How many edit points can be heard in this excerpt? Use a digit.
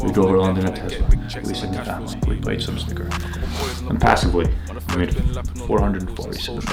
0